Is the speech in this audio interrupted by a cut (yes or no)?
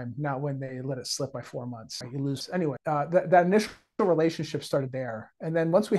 no